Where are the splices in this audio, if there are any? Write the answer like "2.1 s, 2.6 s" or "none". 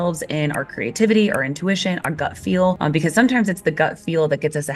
2.8 s